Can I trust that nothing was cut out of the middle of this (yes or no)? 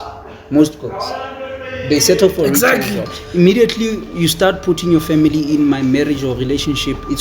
no